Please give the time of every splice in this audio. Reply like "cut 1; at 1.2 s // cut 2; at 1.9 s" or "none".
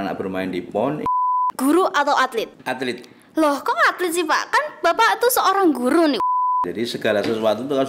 cut 1; at 1.1 s // cut 2; at 2.6 s // cut 3; at 6.3 s

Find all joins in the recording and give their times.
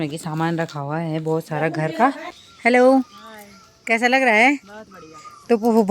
cut 1; at 2.5 s

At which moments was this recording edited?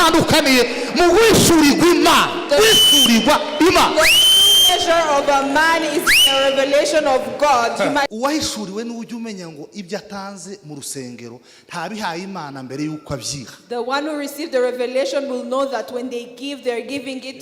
cut 1; at 8.1 s

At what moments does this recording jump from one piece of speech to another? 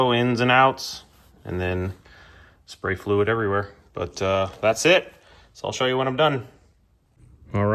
none

